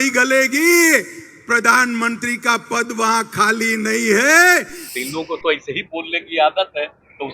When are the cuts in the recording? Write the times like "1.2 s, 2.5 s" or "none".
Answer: 4.8 s